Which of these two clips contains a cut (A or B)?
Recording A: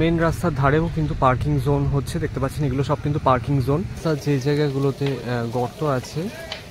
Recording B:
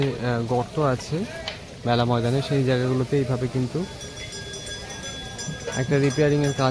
A